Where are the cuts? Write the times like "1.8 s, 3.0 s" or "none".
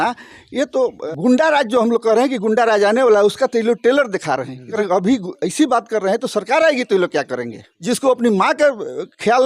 1.0 s, 4.7 s, 7.7 s